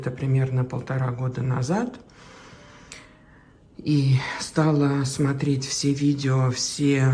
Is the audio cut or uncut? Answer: uncut